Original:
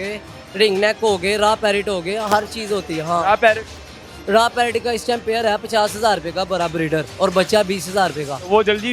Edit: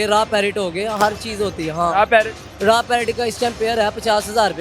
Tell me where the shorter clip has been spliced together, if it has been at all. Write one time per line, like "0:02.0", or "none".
0:02.4